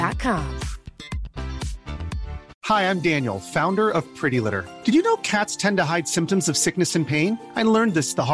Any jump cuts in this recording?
yes; 1 cut; at 2.5 s

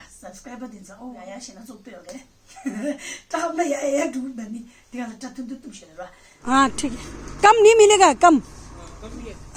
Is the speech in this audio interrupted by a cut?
yes; 2 cuts; at 1.2 s, 6.4 s

